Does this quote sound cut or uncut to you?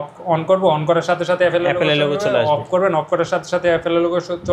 uncut